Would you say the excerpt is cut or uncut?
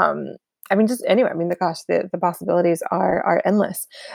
uncut